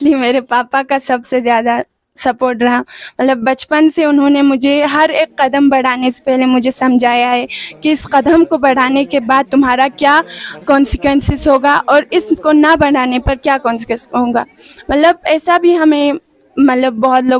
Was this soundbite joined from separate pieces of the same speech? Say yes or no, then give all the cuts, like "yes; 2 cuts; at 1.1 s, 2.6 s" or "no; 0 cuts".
no; 0 cuts